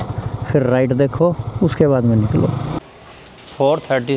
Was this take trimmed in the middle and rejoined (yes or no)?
yes